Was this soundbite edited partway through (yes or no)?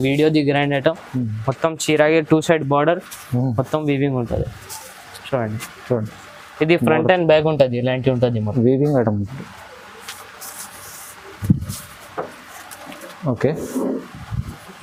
no